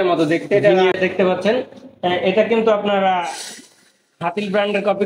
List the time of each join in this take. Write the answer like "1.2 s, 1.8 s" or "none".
1.0 s